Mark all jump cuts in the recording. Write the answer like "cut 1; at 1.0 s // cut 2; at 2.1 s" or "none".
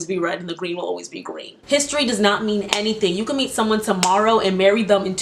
cut 1; at 1.6 s